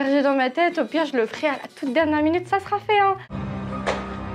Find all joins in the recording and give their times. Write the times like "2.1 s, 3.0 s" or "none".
3.3 s